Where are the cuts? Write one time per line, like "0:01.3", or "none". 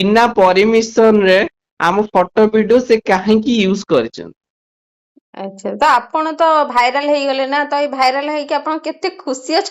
none